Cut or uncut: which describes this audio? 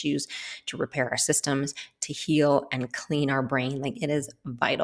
uncut